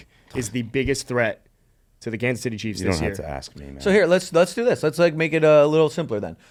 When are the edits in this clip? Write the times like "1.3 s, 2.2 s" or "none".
none